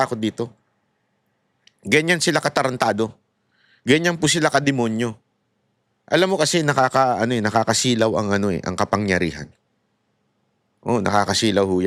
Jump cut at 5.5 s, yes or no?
no